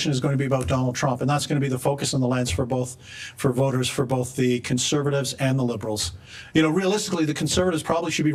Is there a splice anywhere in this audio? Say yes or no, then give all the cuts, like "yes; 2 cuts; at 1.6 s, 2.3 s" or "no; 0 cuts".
no; 0 cuts